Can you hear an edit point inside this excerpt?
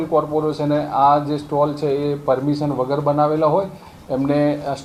no; 0 cuts

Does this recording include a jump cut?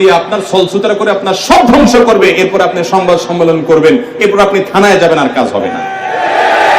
no; 0 cuts

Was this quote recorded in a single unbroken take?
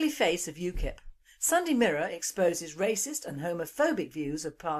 no; 1 cut; at 1.3 s

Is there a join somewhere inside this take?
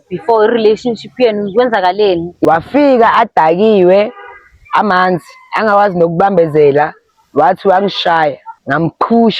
yes; 2 cuts; at 2.4 s, 8.5 s

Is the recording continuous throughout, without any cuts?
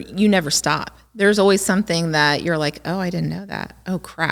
yes; 0 cuts

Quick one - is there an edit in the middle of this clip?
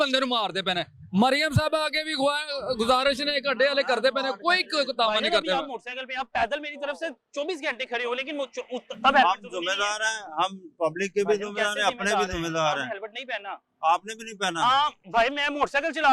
no; 0 cuts

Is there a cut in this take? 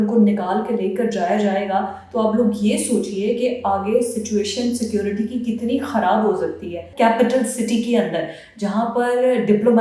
yes; 1 cut; at 6.9 s

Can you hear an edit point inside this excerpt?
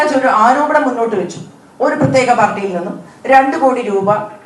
no; 0 cuts

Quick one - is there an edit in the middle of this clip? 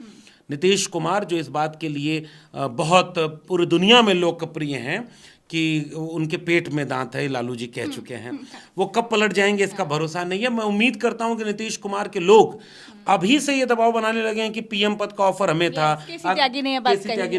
no; 0 cuts

